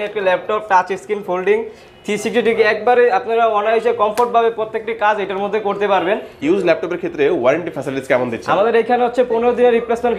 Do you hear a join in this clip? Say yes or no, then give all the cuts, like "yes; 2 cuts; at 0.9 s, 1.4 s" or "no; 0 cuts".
yes; 1 cut; at 6.4 s